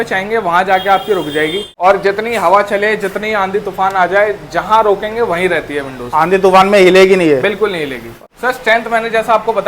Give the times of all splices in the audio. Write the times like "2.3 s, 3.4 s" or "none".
1.7 s, 8.2 s